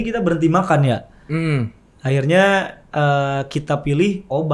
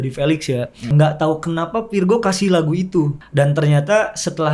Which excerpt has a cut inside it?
second; 2 cuts; at 0.9 s, 3.2 s

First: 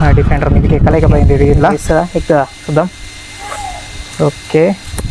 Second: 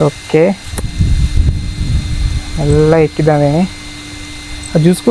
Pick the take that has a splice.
first; 1 cut; at 1.8 s

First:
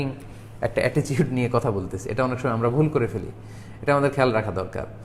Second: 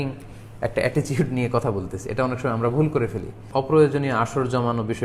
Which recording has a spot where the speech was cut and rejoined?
second; 1 cut; at 3.4 s

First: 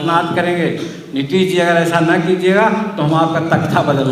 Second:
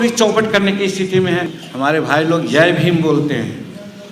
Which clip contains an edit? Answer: second; 1 cut; at 1.6 s

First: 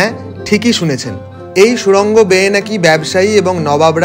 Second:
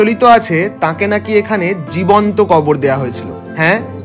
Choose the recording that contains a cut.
first; 1 cut; at 1.3 s

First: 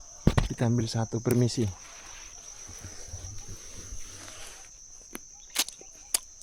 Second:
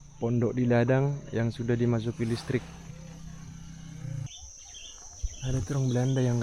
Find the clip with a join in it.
second; 1 cut; at 4.3 s

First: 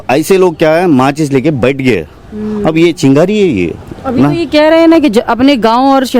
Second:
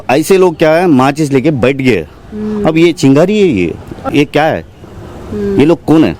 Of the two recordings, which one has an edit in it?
second; 1 cut; at 3.9 s

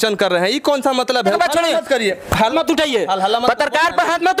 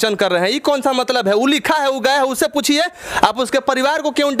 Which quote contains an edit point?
first; 2 cuts; at 1.3 s, 2.5 s

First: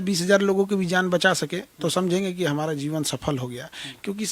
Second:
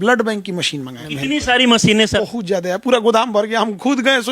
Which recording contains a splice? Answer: second; 2 cuts; at 1.0 s, 2.2 s

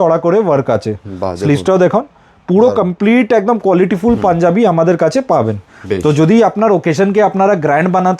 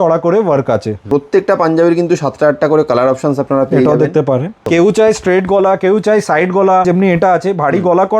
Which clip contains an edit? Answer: second; 3 cuts; at 1.1 s, 4.6 s, 6.8 s

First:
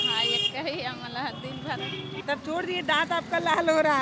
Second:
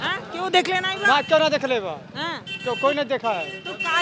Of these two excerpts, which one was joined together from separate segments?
first; 1 cut; at 2.2 s

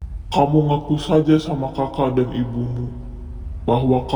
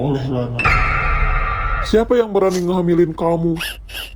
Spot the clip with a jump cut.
second; 1 cut; at 1.8 s

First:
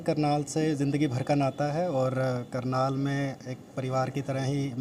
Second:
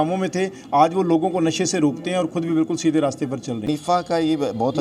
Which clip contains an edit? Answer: second; 1 cut; at 3.6 s

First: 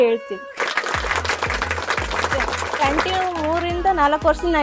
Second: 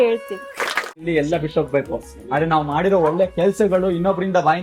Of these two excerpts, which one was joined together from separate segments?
second; 1 cut; at 0.9 s

